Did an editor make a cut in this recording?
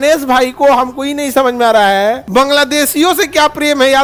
no; 0 cuts

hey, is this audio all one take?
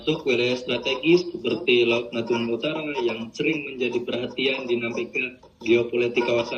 yes; 0 cuts

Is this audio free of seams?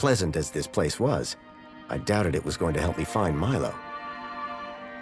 no; 1 cut; at 3.7 s

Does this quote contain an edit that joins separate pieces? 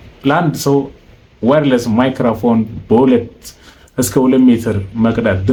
no; 0 cuts

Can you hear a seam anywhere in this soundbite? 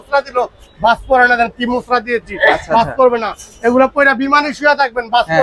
no; 0 cuts

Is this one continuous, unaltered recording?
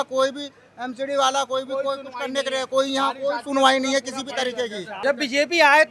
no; 1 cut; at 4.9 s

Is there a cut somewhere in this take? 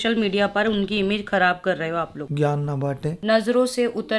yes; 2 cuts; at 2.2 s, 3.2 s

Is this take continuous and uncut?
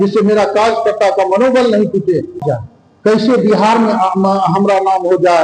no; 1 cut; at 2.4 s

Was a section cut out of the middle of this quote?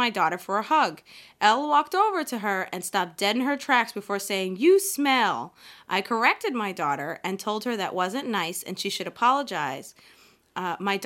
no; 0 cuts

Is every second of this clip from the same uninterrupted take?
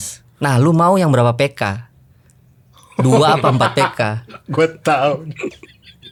yes; 0 cuts

